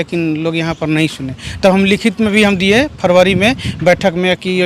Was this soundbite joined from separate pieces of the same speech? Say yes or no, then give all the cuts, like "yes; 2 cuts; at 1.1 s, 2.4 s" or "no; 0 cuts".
no; 0 cuts